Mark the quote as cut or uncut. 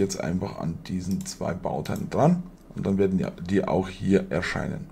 uncut